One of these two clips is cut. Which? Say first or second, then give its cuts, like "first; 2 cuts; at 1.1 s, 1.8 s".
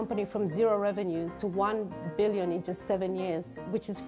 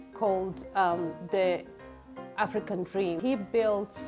second; 1 cut; at 3.2 s